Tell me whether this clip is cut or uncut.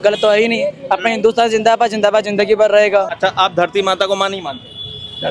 cut